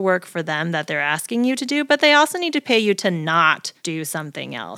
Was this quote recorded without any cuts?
no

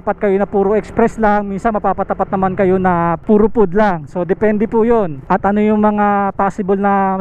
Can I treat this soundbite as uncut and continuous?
no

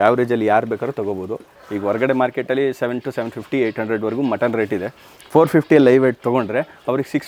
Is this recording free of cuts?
yes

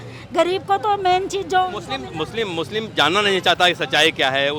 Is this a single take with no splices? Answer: yes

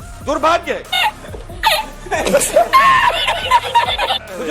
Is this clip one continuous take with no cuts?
yes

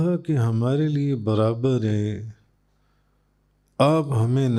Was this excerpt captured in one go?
yes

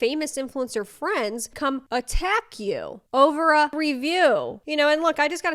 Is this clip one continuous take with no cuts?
no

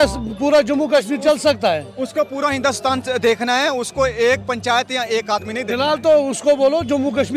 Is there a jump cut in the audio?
no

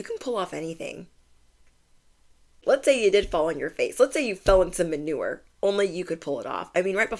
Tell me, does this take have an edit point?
yes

